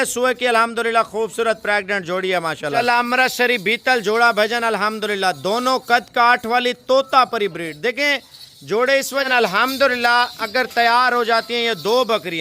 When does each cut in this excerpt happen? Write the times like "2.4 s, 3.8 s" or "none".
2.8 s, 9.3 s